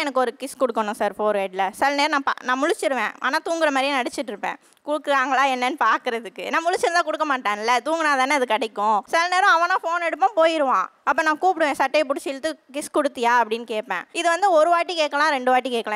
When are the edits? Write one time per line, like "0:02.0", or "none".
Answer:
0:09.1
0:14.0